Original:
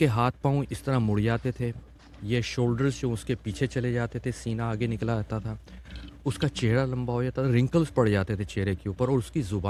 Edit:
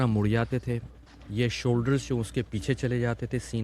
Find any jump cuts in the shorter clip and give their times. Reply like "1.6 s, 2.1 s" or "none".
none

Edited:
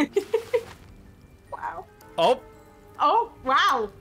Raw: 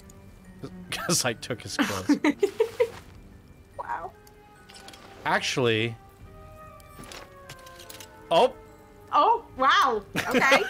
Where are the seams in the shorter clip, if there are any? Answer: 2.0 s

